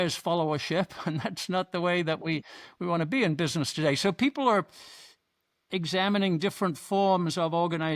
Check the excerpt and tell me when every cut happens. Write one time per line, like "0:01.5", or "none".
none